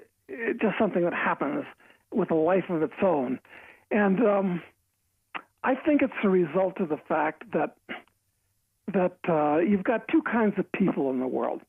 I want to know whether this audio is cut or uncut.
cut